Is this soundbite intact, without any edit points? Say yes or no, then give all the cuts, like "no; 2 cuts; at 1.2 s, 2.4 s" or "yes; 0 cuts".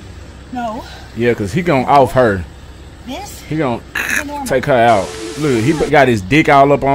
no; 1 cut; at 5.3 s